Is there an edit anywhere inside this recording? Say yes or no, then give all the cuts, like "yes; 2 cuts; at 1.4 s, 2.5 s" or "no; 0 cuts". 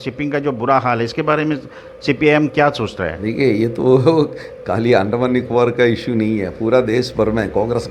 no; 0 cuts